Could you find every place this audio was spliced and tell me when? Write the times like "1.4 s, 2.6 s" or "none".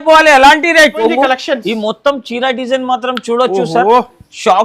1.0 s